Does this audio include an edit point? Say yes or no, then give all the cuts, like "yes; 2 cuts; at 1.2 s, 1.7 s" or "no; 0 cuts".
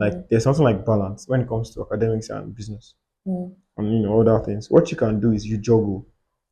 no; 0 cuts